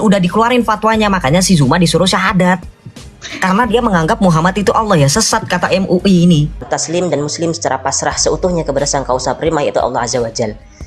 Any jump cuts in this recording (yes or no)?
yes